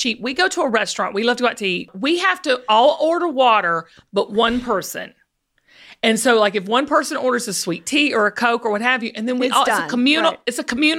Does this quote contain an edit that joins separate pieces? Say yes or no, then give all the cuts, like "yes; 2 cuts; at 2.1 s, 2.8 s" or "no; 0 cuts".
yes; 1 cut; at 1.9 s